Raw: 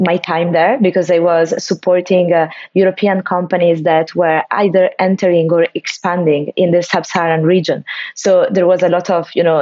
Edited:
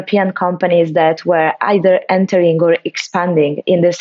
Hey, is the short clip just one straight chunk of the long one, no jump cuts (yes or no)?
yes